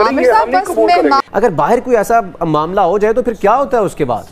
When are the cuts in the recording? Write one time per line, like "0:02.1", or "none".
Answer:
0:01.2